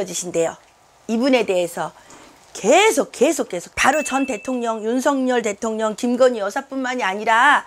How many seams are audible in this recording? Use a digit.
1